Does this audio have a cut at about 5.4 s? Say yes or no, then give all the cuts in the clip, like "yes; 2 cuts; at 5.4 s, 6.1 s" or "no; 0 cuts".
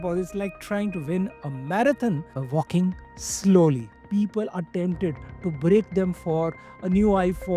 no; 1 cut; at 4.0 s